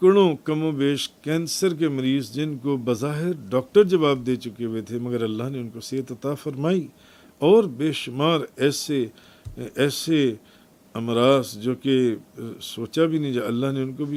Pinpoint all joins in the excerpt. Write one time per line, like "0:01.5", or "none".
none